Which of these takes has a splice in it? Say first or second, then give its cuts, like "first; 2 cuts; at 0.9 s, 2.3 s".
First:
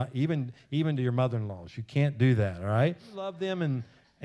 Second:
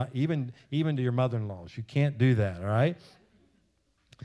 first; 1 cut; at 3.4 s